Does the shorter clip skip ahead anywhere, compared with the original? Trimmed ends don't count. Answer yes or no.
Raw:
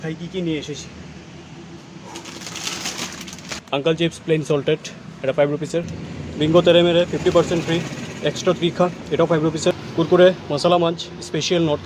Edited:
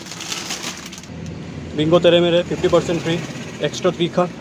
yes